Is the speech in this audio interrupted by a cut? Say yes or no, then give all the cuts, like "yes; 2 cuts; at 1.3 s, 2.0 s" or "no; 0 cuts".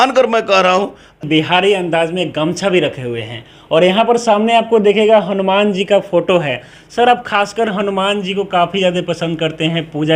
yes; 1 cut; at 1.2 s